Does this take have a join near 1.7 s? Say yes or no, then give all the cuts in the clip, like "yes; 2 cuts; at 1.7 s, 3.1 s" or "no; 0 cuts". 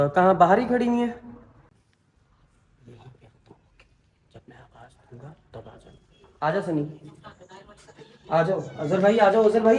yes; 1 cut; at 1.7 s